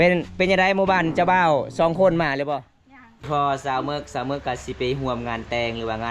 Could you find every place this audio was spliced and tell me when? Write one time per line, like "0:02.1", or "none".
0:03.3